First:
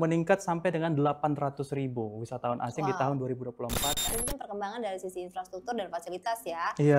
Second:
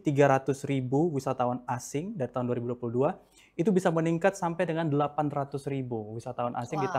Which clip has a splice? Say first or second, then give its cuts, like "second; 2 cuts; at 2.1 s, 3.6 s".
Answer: first; 1 cut; at 4.0 s